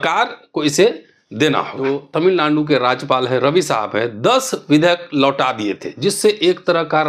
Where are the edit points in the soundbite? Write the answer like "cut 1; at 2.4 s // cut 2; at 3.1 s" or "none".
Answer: cut 1; at 1.8 s